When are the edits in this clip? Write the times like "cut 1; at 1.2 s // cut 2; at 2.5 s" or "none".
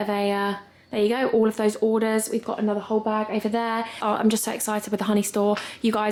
none